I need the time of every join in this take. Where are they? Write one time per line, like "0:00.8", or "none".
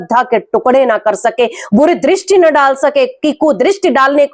none